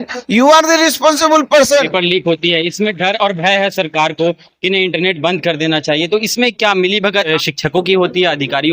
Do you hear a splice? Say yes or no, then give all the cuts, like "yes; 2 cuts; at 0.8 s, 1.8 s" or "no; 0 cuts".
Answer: yes; 2 cuts; at 1.9 s, 7.3 s